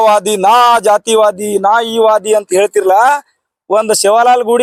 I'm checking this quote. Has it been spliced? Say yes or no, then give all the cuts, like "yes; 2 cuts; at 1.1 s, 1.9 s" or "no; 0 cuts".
no; 0 cuts